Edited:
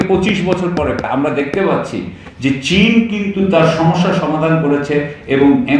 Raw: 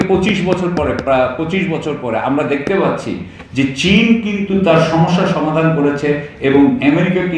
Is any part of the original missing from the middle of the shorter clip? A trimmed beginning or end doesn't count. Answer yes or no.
yes